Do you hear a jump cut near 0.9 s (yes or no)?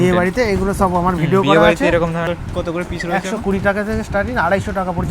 no